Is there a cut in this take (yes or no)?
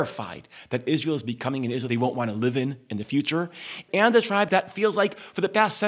yes